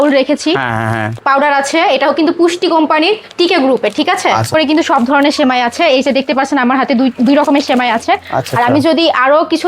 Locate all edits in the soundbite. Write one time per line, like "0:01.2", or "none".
0:01.1
0:04.5